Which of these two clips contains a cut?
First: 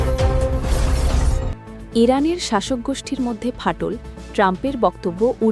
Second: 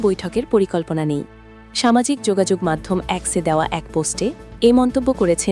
first; 1 cut; at 1.6 s

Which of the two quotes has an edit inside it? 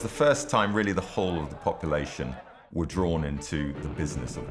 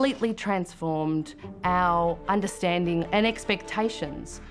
second; 1 cut; at 3.1 s

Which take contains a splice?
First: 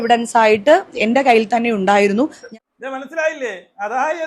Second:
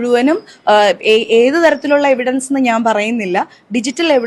first; 1 cut; at 2.4 s

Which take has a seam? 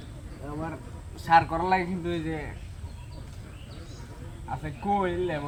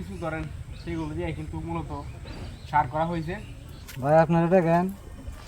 second; 1 cut; at 4.1 s

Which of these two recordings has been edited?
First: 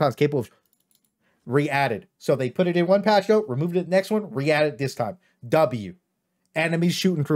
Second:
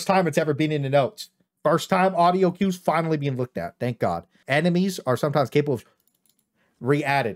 second; 1 cut; at 4.4 s

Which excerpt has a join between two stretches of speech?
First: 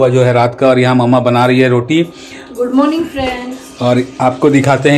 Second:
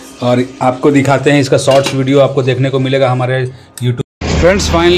second; 1 cut; at 4.0 s

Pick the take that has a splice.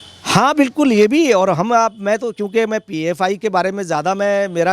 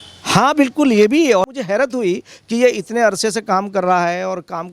second; 1 cut; at 1.6 s

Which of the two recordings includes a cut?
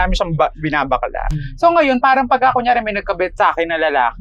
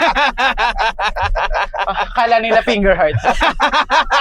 first; 1 cut; at 1.2 s

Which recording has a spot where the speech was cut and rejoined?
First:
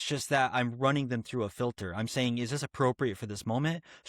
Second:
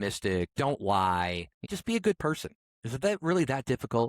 second; 1 cut; at 1.6 s

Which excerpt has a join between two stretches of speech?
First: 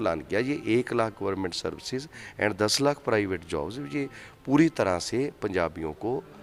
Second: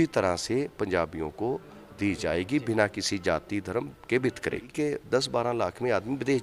second; 1 cut; at 4.7 s

